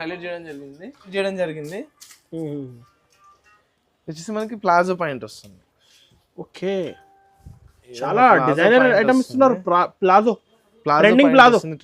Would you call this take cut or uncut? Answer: cut